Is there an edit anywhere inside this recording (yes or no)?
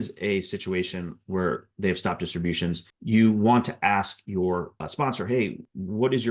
no